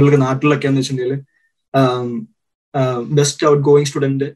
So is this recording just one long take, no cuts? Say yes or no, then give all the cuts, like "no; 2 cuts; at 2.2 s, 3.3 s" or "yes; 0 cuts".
yes; 0 cuts